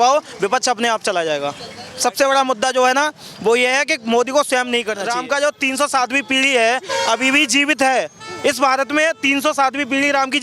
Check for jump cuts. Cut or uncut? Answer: cut